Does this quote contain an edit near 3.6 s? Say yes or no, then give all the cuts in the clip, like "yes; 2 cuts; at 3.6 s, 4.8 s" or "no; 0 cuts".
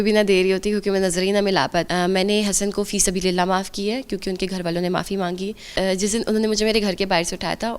no; 2 cuts; at 1.9 s, 5.7 s